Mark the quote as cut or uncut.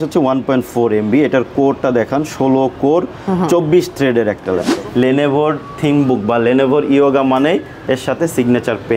cut